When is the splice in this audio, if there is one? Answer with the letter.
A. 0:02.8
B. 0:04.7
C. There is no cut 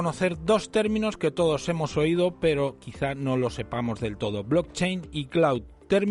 B